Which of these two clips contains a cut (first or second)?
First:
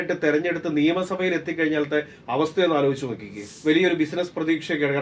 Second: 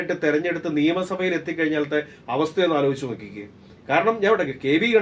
first